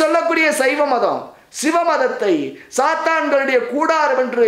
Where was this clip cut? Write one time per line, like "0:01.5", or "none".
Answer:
none